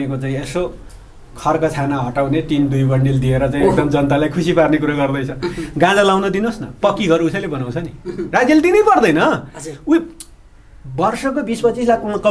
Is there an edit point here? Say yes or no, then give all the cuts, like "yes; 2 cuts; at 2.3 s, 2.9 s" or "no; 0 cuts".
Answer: no; 0 cuts